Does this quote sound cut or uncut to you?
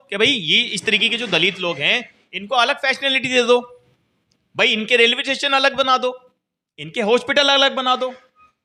uncut